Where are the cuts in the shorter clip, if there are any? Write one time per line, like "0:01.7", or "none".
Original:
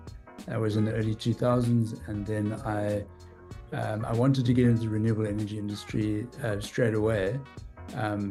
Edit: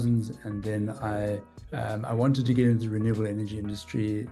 0:01.6